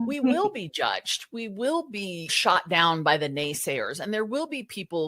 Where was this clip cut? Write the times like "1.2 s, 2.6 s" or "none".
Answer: 2.3 s